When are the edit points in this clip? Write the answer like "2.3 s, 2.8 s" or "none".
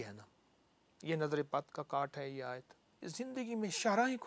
3.0 s